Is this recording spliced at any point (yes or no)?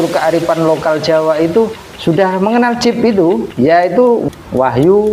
yes